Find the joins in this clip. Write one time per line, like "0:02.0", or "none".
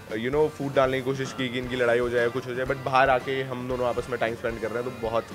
none